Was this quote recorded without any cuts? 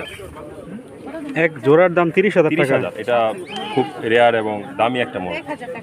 yes; 0 cuts

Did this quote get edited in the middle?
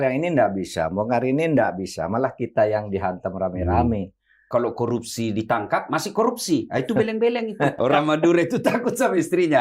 yes; 2 cuts; at 4.5 s, 7.8 s

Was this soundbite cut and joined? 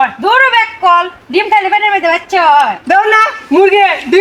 no; 0 cuts

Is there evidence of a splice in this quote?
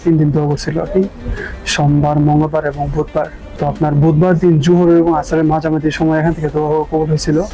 no; 0 cuts

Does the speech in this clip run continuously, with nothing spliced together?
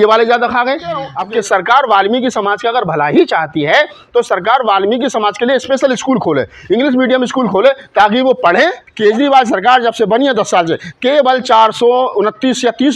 no; 2 cuts; at 1.1 s, 8.8 s

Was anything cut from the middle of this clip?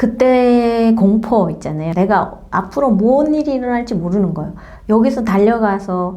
yes; 1 cut; at 1.9 s

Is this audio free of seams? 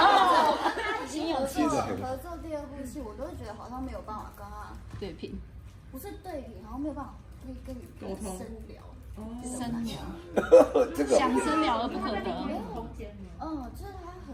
yes; 0 cuts

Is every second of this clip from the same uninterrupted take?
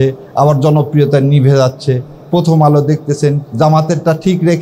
no; 1 cut; at 3.5 s

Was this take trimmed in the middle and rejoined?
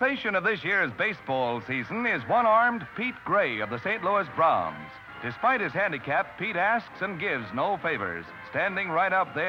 no; 0 cuts

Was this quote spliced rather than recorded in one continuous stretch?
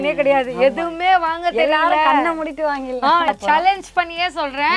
yes; 1 cut; at 3.2 s

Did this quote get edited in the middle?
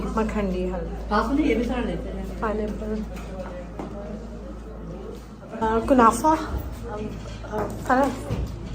yes; 1 cut; at 5.6 s

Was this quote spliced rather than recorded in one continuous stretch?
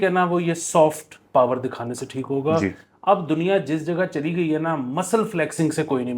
no; 0 cuts

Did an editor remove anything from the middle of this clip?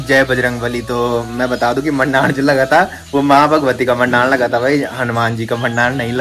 no; 0 cuts

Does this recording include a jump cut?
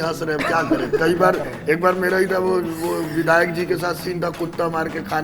no; 0 cuts

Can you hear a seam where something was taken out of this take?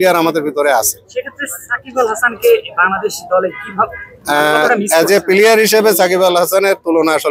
no; 0 cuts

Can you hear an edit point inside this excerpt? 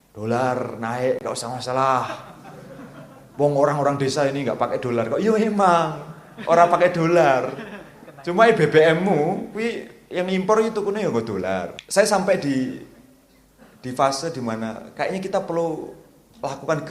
yes; 1 cut; at 11.8 s

